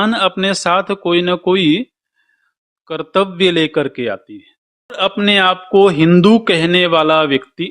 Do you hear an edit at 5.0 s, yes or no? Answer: yes